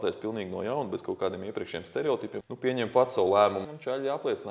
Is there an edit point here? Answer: yes; 2 cuts; at 2.4 s, 3.7 s

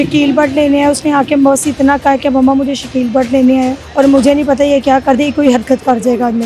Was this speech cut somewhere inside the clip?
yes; 1 cut; at 3.8 s

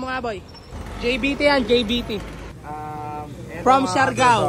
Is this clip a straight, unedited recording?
no; 1 cut; at 3.0 s

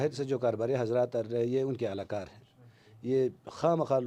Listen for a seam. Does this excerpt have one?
no; 0 cuts

